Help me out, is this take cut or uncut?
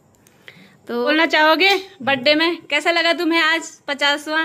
cut